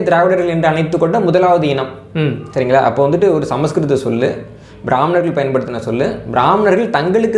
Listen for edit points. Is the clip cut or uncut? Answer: uncut